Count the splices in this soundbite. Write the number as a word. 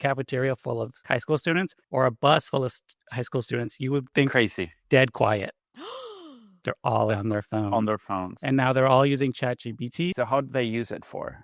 three